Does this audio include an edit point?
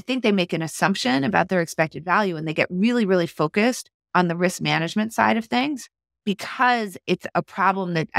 yes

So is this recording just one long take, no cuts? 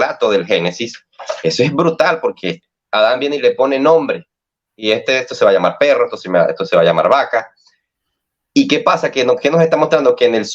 no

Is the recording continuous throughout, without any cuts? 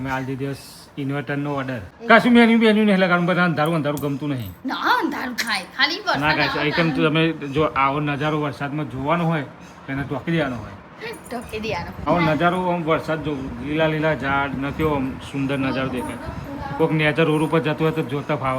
no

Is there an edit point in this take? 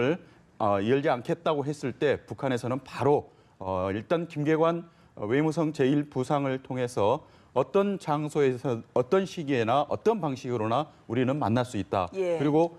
yes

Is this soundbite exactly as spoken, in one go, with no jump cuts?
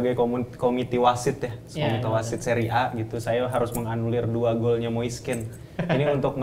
yes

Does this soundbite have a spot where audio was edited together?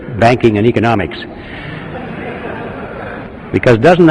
yes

